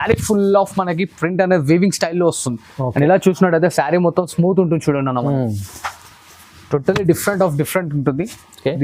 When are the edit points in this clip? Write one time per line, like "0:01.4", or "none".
none